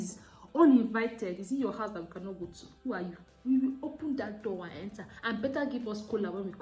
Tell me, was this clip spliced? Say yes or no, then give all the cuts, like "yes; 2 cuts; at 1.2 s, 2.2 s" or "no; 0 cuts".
no; 0 cuts